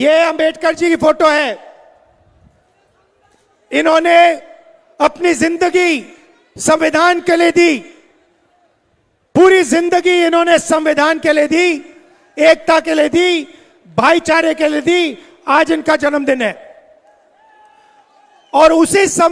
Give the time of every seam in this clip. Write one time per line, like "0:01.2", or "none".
none